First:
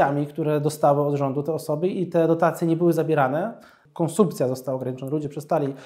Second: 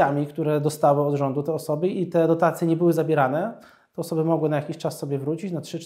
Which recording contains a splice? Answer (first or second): first